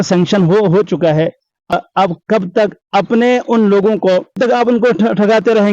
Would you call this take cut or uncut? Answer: cut